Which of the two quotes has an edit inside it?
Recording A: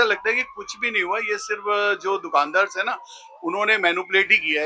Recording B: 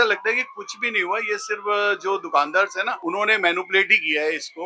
B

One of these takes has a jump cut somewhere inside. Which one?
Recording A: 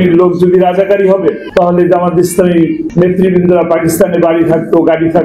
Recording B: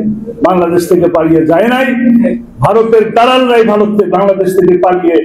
A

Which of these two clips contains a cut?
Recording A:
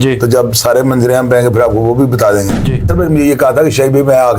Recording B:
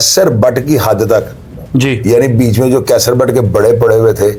A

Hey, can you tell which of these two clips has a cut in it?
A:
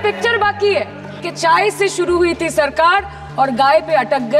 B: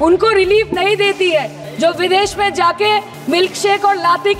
A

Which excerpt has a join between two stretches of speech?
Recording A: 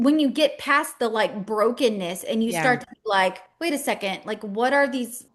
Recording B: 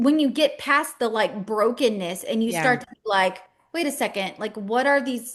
A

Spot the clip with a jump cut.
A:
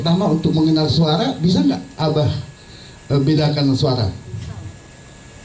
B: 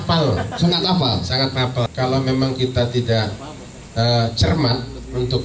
B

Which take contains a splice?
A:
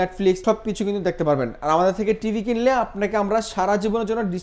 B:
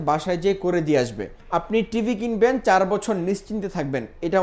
B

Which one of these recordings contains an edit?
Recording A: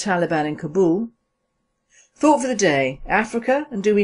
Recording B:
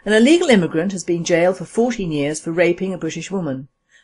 B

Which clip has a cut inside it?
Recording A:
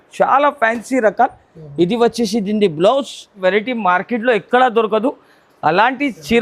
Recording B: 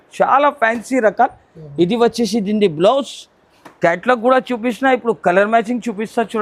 A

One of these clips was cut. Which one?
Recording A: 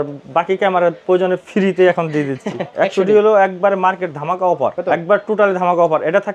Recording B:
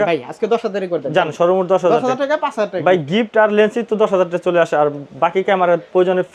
A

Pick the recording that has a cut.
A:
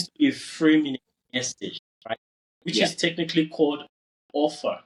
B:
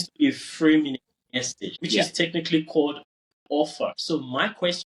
B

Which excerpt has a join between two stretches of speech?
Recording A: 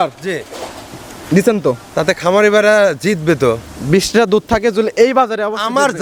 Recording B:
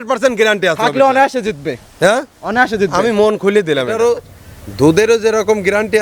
B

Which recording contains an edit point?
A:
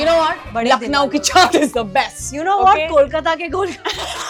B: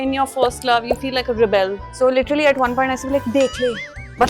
B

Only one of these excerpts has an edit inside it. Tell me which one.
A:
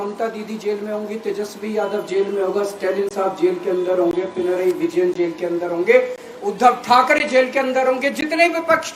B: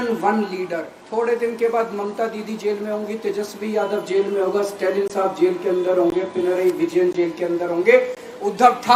B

